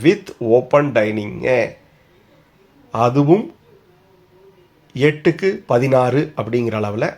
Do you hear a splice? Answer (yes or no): no